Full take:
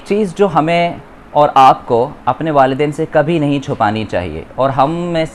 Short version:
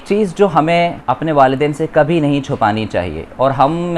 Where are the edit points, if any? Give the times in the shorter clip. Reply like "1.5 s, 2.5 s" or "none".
1.1 s